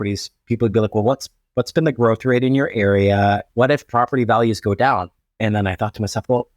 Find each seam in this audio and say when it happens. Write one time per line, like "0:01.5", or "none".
0:03.5
0:05.2